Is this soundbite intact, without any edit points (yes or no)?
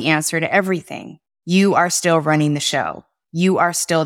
yes